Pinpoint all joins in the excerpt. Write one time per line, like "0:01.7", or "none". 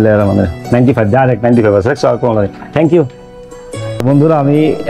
0:04.0

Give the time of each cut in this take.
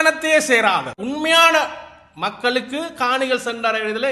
0:01.0

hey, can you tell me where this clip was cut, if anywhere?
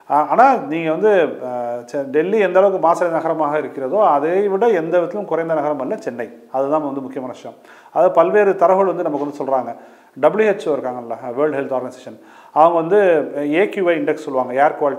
none

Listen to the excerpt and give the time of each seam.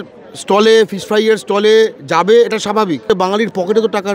0:03.0

